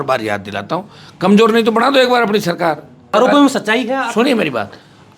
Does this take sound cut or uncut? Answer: cut